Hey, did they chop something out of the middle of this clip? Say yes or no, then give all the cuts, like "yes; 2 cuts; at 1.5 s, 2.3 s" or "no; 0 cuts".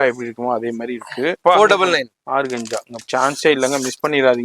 yes; 2 cuts; at 1.4 s, 2.9 s